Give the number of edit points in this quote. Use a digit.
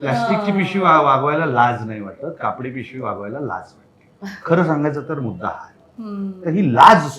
0